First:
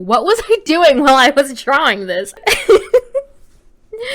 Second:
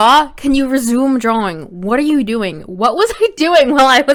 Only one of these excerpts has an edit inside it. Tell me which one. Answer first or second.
first